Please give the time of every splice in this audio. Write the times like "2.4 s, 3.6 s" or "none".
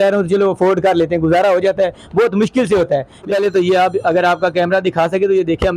3.2 s